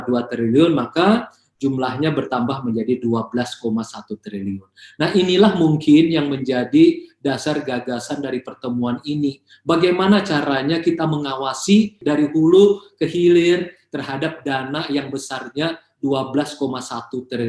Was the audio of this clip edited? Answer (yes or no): yes